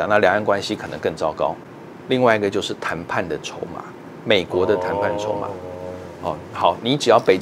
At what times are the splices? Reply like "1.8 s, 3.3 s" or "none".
1.6 s